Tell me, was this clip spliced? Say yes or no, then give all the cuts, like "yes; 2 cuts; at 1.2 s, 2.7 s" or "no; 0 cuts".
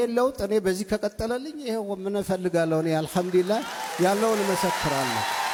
no; 0 cuts